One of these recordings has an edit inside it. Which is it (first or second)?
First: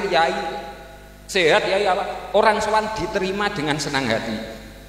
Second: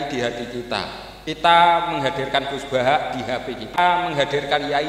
second